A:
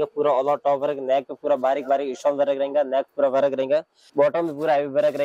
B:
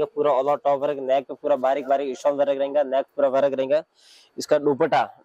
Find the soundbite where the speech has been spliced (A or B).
A